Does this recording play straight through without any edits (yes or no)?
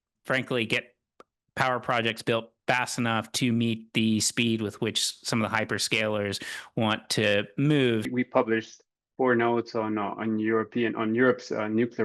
no